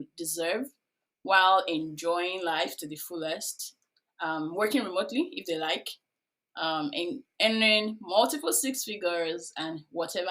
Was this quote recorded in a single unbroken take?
yes; 0 cuts

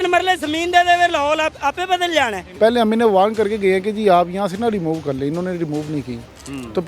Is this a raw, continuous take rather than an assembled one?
no; 1 cut; at 2.4 s

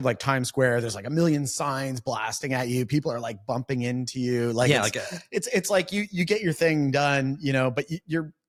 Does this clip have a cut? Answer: no; 0 cuts

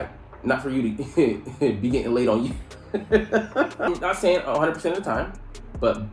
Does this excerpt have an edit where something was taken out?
yes; 1 cut; at 3.9 s

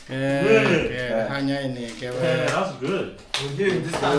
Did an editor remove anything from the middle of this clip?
no; 0 cuts

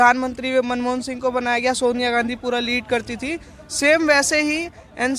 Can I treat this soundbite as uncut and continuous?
yes; 0 cuts

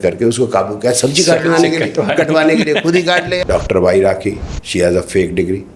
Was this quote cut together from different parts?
yes; 1 cut; at 3.3 s

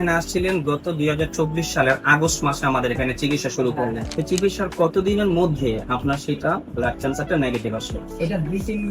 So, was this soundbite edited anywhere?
yes; 1 cut; at 4.1 s

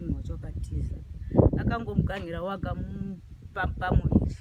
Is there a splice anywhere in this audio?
no; 0 cuts

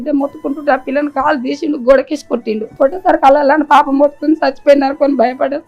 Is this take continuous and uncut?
no; 1 cut; at 2.7 s

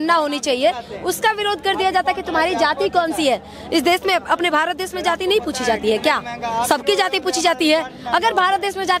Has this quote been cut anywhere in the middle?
no; 0 cuts

